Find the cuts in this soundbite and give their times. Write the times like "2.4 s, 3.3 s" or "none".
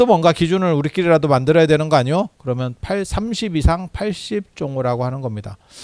none